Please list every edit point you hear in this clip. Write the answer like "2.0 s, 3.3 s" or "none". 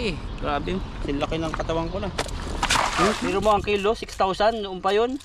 3.2 s